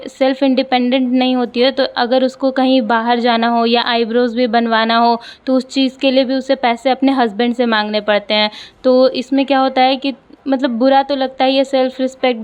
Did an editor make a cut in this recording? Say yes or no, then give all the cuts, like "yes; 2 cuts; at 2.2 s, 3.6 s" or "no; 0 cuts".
no; 0 cuts